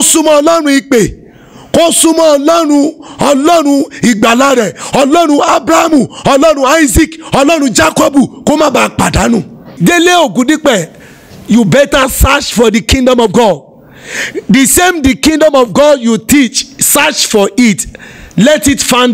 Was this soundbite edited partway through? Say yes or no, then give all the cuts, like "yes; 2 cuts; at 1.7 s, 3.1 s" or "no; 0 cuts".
yes; 1 cut; at 9.7 s